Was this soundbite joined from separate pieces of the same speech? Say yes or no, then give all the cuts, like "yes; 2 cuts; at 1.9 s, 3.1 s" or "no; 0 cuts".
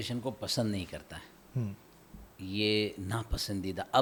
no; 0 cuts